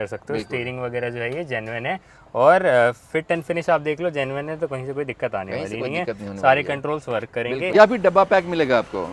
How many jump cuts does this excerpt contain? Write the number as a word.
one